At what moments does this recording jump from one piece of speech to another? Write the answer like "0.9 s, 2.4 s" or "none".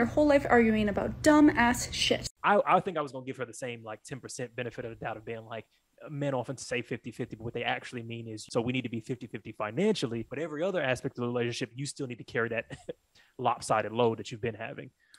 2.3 s, 8.4 s, 10.3 s